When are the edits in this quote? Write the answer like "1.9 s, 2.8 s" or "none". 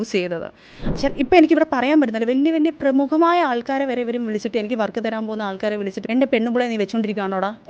1.0 s, 6.0 s